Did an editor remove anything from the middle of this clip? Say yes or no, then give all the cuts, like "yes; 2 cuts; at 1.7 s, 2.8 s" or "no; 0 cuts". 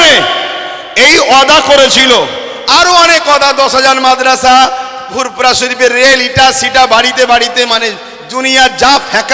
no; 0 cuts